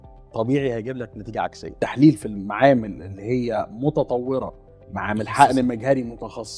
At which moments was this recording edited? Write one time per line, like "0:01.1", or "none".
0:01.6